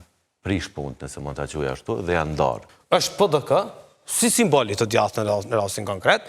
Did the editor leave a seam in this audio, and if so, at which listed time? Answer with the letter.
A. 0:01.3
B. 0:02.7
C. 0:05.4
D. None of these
B